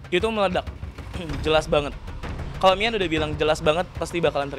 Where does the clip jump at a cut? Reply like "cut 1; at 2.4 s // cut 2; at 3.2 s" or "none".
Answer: cut 1; at 1.2 s